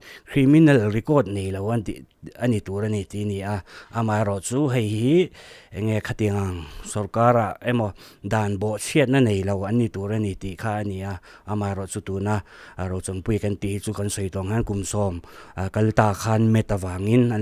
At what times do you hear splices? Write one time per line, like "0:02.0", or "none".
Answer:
none